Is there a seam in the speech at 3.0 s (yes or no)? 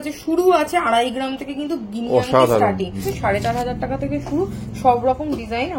yes